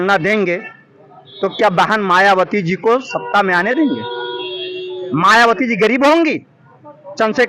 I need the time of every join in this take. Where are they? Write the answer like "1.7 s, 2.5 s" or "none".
none